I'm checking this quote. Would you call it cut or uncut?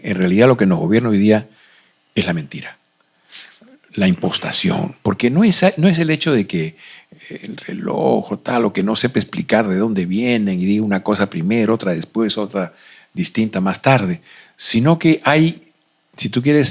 uncut